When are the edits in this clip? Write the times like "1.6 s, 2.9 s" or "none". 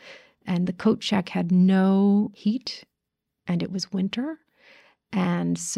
2.3 s